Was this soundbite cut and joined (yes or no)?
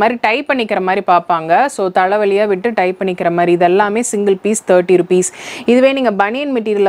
no